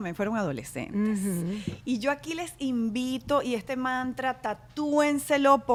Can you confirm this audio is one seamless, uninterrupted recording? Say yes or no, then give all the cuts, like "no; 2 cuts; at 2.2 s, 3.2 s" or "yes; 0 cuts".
yes; 0 cuts